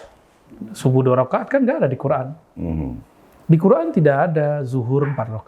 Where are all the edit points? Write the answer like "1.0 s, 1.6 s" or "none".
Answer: none